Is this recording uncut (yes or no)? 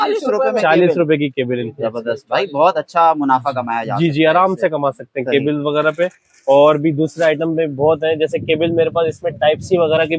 yes